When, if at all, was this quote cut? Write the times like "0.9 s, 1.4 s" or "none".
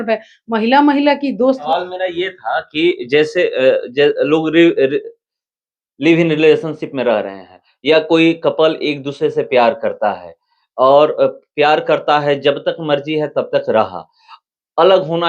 1.7 s